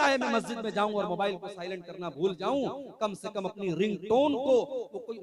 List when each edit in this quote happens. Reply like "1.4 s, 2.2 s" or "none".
none